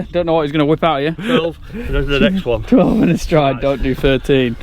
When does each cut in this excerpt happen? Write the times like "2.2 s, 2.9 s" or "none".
1.2 s